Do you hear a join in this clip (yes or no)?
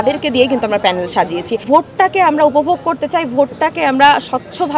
yes